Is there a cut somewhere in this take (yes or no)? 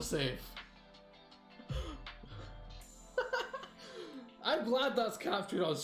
no